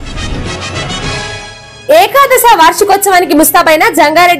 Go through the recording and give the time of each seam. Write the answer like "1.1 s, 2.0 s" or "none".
1.6 s